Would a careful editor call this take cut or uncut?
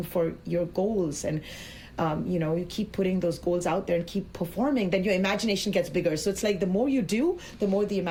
uncut